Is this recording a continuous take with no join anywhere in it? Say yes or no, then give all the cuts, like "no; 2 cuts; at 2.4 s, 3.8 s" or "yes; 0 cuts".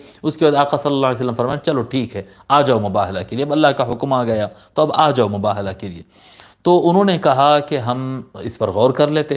yes; 0 cuts